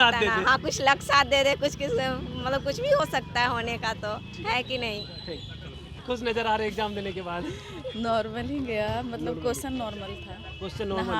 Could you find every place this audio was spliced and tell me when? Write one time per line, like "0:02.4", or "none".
none